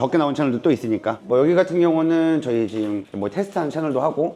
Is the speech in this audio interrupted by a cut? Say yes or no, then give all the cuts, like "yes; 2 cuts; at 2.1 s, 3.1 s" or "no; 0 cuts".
no; 0 cuts